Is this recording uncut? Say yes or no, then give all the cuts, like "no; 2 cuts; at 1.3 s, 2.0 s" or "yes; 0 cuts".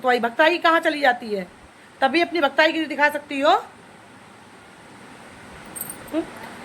yes; 0 cuts